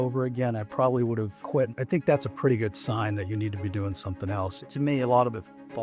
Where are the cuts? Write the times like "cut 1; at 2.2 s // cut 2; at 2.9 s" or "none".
cut 1; at 1.7 s // cut 2; at 4.6 s